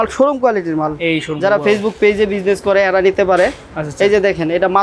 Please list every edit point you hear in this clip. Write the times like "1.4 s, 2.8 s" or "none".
none